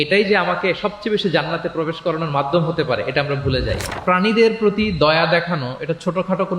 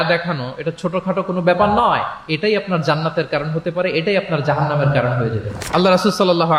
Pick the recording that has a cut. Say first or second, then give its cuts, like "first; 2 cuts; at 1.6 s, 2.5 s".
first; 1 cut; at 4.0 s